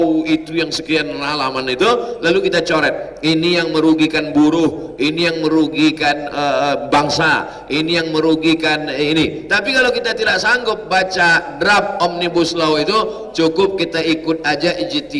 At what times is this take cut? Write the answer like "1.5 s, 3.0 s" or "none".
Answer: none